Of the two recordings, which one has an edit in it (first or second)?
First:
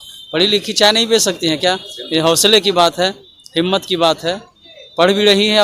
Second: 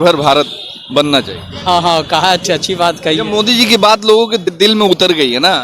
second